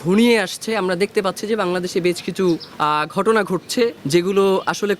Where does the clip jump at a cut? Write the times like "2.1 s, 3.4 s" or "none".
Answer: 2.7 s, 4.0 s